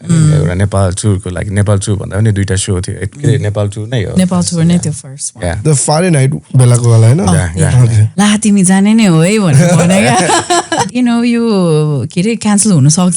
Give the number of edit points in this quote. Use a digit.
2